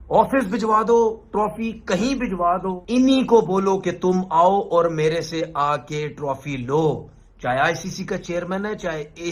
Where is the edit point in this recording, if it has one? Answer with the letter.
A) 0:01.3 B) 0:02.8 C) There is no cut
B